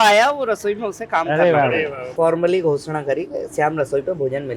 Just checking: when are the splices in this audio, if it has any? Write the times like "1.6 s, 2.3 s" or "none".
2.0 s